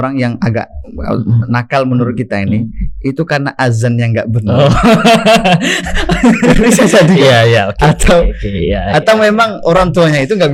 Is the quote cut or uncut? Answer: uncut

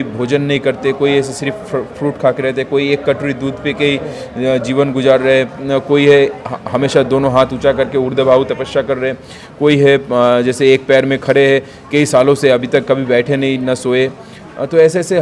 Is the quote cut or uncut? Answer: uncut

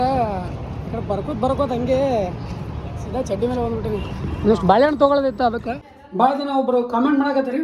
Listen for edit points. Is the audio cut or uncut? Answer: cut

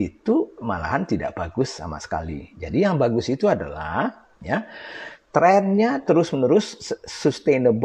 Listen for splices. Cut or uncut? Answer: uncut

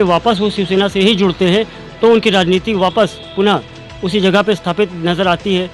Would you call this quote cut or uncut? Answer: cut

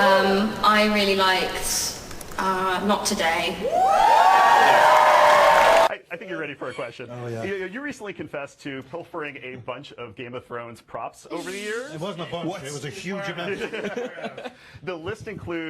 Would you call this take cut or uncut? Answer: cut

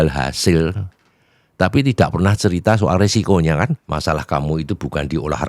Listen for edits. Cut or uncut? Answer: cut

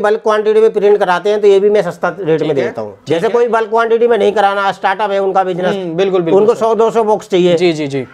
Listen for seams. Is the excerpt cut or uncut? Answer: cut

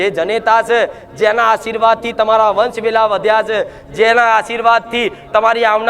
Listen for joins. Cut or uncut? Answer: uncut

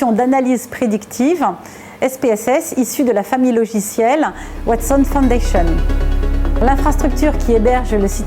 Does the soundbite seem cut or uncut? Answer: uncut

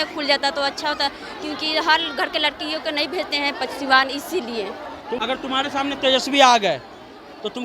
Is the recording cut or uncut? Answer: cut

